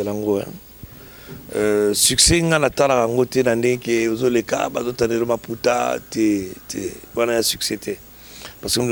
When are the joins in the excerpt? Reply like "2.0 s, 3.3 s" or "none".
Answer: none